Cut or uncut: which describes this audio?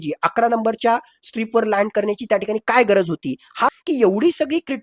cut